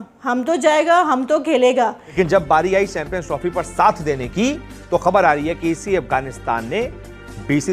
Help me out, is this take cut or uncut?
cut